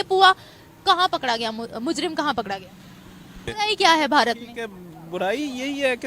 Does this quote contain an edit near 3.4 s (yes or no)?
yes